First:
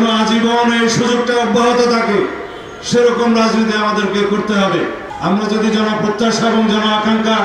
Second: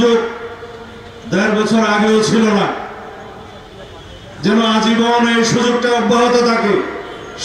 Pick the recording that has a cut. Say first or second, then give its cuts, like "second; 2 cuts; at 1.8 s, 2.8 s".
first; 1 cut; at 5.1 s